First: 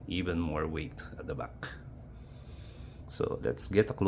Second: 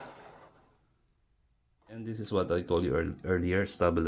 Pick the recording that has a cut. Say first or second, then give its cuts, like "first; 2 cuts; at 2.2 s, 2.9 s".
second; 1 cut; at 2.0 s